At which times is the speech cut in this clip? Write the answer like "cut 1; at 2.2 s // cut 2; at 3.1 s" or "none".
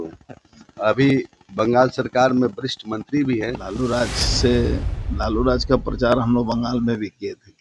cut 1; at 3.7 s